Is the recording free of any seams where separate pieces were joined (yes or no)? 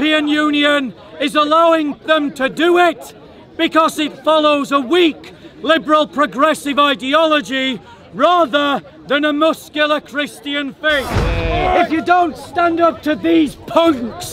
no